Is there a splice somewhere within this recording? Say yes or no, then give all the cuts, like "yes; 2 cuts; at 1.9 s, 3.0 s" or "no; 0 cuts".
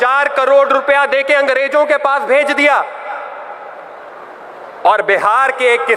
no; 0 cuts